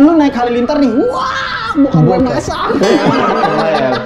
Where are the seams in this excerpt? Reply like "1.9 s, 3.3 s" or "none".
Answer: none